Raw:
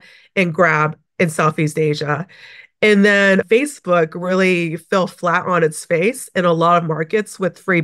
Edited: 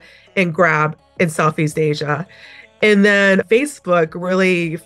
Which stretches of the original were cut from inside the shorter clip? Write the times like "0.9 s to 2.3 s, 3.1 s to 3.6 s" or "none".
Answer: none

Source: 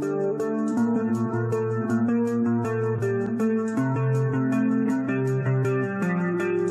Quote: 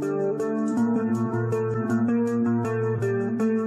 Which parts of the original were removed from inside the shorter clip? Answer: none

